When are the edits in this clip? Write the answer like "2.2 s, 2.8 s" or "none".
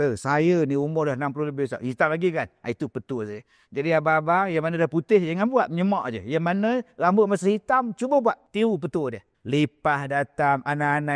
8.4 s, 9.3 s